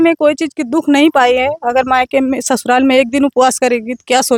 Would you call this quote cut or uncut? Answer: uncut